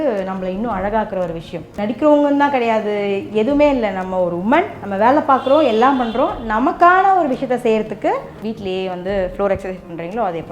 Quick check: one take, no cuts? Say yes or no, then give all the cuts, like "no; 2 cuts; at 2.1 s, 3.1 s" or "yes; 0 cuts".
no; 3 cuts; at 1.7 s, 4.8 s, 8.3 s